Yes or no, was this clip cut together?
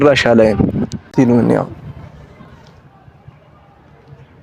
yes